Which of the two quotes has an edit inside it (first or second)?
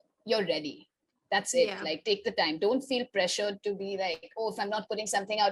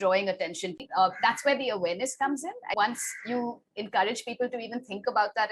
second